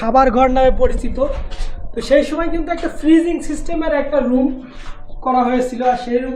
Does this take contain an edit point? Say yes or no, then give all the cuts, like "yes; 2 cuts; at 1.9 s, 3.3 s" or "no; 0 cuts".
no; 0 cuts